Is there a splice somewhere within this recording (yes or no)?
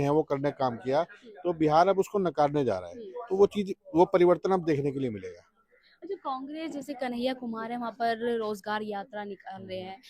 no